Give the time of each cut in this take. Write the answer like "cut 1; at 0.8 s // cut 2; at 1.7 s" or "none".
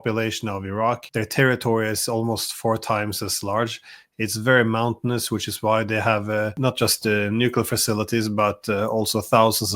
cut 1; at 1.0 s // cut 2; at 6.5 s